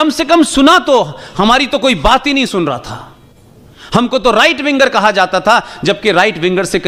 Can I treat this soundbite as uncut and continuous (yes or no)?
yes